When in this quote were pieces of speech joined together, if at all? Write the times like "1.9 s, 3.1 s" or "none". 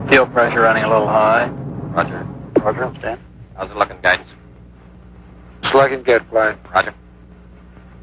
none

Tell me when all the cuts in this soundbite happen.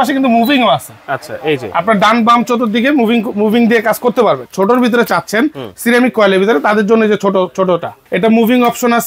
4.5 s, 8.0 s

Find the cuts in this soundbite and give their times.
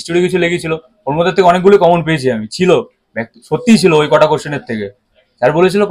none

